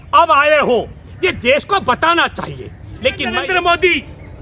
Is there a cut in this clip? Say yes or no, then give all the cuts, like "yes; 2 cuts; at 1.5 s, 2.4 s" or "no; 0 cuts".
yes; 1 cut; at 3.3 s